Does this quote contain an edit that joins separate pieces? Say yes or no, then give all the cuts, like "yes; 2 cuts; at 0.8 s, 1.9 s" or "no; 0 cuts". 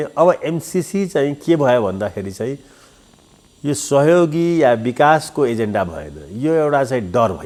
no; 0 cuts